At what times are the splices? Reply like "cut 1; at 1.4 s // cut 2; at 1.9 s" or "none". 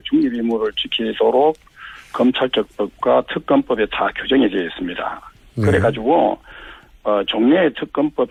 none